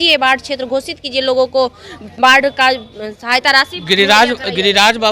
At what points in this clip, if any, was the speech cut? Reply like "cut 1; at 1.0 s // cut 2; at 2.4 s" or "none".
none